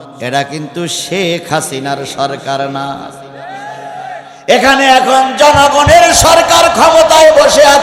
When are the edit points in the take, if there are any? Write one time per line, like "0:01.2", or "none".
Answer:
none